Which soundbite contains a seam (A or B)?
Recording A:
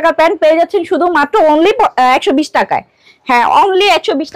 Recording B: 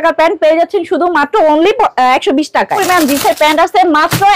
B